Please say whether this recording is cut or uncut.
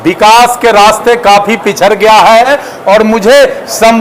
cut